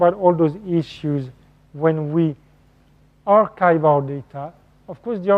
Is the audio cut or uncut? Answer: cut